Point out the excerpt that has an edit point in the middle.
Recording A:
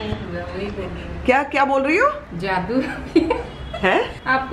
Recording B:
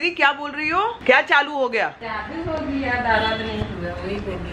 B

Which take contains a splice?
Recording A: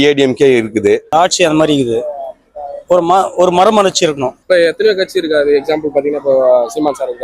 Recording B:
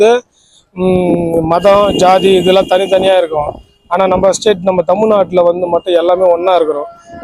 A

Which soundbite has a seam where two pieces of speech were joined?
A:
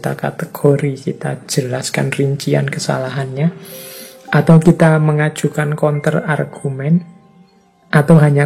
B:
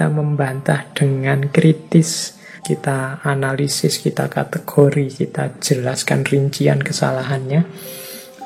B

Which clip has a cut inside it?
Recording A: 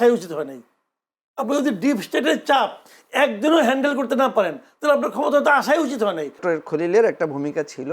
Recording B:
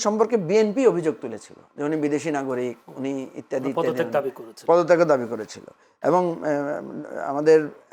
A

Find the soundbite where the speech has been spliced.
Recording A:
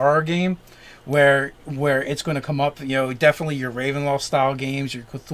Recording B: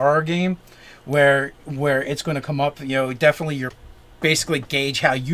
A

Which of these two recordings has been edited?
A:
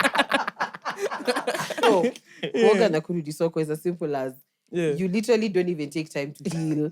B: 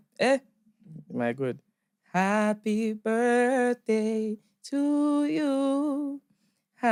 A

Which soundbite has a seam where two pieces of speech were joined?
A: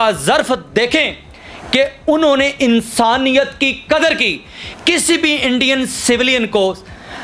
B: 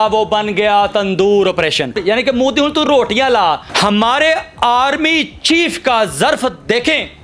B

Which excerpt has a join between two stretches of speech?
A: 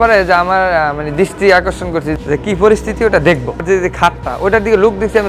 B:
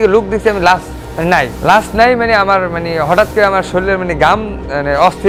A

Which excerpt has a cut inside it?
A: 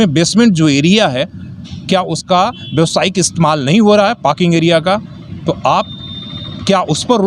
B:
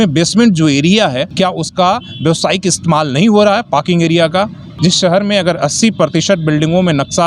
B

